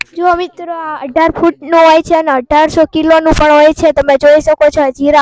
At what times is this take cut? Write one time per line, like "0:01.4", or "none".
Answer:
none